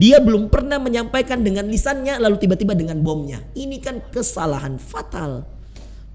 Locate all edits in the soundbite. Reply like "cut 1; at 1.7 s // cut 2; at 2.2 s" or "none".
none